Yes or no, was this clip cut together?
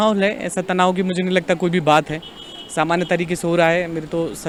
no